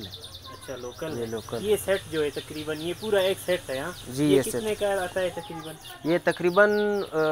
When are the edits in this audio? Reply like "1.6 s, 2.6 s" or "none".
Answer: none